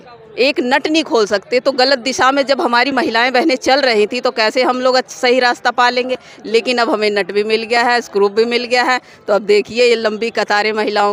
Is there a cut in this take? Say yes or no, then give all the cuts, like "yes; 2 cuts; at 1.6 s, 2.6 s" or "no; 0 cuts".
no; 0 cuts